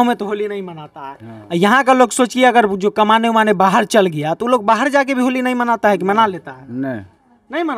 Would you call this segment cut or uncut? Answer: uncut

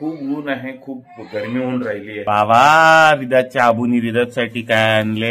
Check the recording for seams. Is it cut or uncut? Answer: cut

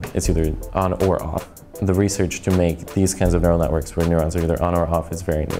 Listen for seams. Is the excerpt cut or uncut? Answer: cut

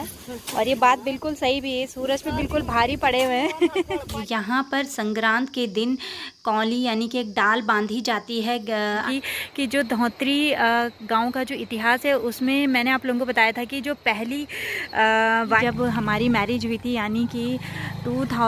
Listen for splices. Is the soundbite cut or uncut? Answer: cut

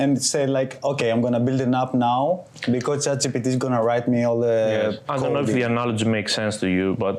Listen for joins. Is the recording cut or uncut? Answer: uncut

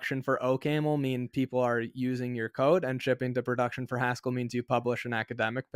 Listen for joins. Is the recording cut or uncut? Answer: uncut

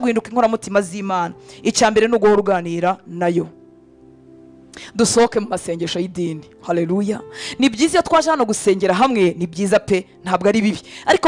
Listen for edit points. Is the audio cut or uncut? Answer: uncut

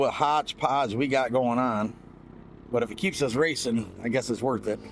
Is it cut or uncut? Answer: uncut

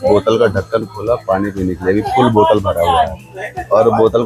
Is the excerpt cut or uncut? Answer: uncut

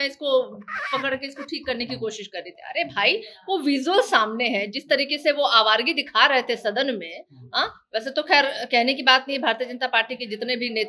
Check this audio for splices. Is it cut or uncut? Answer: uncut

